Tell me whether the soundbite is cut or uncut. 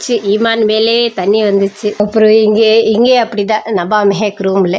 cut